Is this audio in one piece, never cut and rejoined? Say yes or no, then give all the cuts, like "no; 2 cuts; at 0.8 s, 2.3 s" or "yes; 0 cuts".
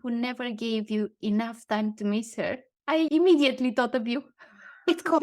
no; 1 cut; at 3.0 s